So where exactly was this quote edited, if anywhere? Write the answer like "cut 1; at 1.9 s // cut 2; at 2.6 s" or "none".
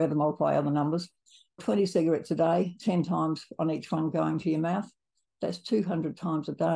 cut 1; at 1.6 s